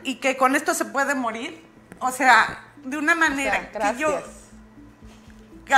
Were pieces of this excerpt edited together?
no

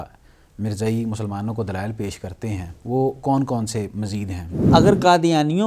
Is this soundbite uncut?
no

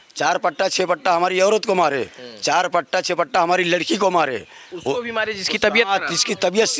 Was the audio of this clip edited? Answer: no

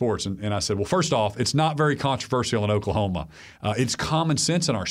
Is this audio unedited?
yes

